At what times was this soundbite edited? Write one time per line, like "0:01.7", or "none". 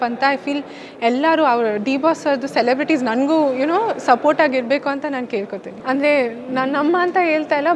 0:05.7